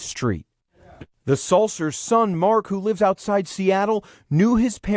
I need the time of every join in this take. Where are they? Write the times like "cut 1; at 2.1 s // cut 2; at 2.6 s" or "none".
cut 1; at 0.9 s